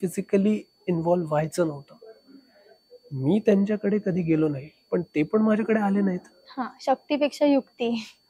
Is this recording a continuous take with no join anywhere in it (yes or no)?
yes